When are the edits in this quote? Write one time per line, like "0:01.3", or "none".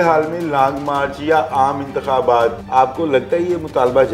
0:02.6

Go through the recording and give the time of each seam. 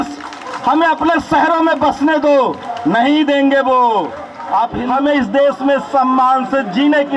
0:04.8

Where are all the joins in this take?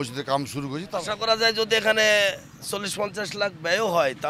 0:00.9

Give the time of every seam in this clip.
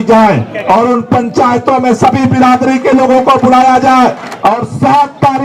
0:04.3

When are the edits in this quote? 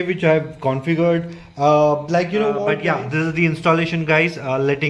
0:02.8

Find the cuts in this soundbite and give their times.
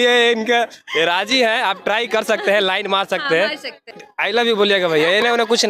0:03.9

